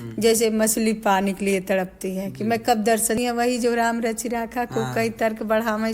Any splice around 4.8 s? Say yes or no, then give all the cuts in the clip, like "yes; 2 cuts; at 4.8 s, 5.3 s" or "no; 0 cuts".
no; 1 cut; at 3.2 s